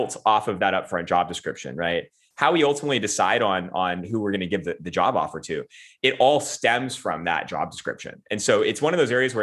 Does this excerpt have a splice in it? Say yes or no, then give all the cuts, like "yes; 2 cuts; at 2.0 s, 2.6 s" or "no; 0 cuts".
yes; 1 cut; at 2.2 s